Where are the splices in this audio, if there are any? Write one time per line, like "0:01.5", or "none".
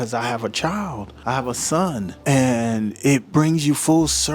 0:01.1
0:03.3